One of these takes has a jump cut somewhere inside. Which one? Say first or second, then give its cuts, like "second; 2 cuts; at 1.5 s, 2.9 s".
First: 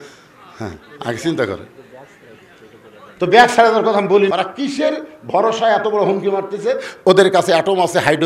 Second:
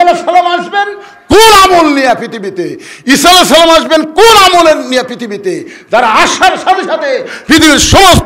first; 1 cut; at 4.3 s